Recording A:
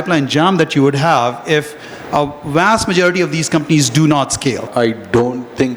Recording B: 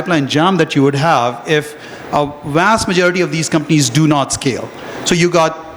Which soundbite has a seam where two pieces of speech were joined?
A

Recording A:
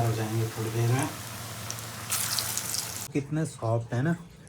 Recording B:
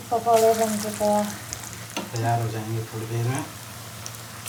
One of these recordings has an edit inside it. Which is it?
A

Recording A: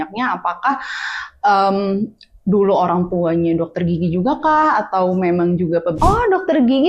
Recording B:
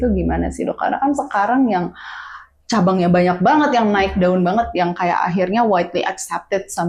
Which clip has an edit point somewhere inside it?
A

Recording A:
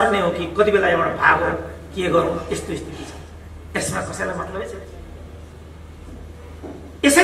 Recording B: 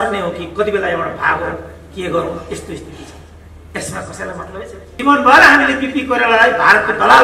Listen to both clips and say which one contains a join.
B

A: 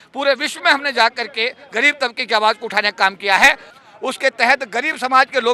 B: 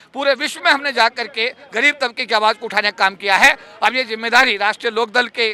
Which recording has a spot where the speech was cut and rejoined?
A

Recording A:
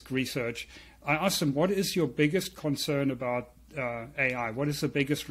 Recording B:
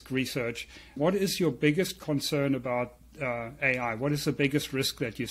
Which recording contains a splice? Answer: B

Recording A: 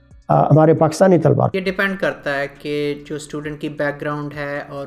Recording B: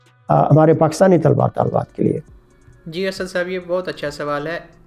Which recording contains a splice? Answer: A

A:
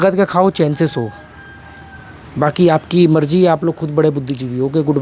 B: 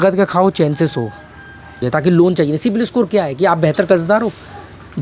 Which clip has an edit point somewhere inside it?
B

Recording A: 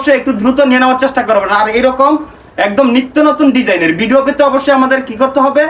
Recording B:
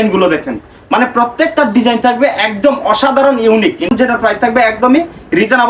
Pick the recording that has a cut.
B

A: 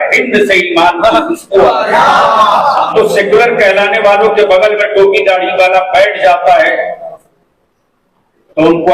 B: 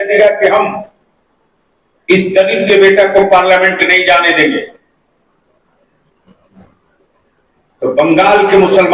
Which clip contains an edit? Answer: A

